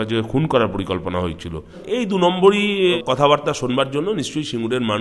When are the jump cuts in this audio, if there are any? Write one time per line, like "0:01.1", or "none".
0:01.8
0:03.0